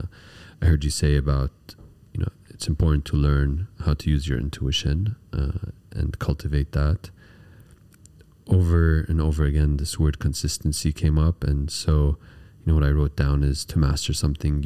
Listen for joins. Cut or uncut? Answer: uncut